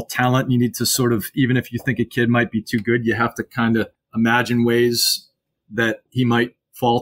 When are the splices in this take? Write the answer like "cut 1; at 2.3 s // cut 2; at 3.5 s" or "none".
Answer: cut 1; at 4.0 s // cut 2; at 6.0 s